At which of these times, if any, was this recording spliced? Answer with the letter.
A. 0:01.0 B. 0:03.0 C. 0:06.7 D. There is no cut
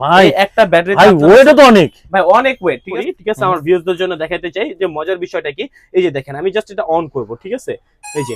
B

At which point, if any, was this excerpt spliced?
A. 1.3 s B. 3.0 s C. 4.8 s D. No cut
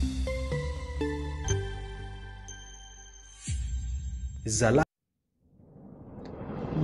C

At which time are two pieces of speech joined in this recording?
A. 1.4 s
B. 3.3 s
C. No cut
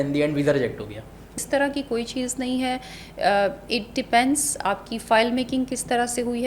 A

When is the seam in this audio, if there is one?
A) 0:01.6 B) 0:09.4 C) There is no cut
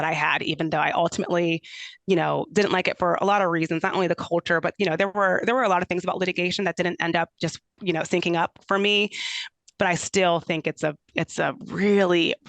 B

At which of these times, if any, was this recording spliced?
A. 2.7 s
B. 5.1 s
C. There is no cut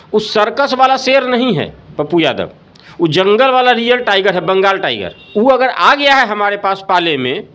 B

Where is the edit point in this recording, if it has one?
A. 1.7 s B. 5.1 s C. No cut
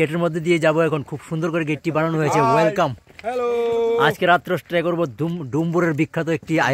C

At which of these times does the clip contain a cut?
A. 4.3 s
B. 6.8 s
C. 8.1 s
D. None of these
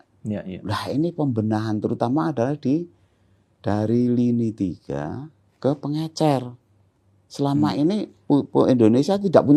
C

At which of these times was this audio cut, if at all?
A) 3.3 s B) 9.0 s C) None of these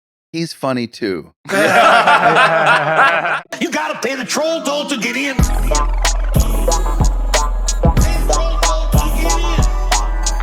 A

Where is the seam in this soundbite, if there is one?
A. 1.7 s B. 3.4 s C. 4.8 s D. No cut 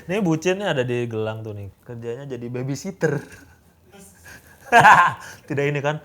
A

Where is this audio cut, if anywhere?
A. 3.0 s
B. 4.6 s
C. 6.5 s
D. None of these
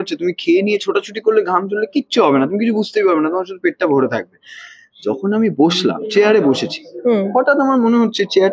D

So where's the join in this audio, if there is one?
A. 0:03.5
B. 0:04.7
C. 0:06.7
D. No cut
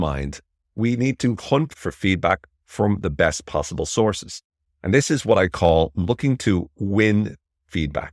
D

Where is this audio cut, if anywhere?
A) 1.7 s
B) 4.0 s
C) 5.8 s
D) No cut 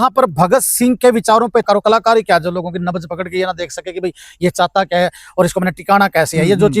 A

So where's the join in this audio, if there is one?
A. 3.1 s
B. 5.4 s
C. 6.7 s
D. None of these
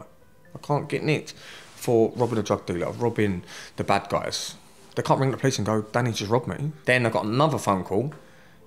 C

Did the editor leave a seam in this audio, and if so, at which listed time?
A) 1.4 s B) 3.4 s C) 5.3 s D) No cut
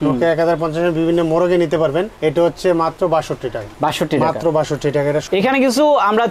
C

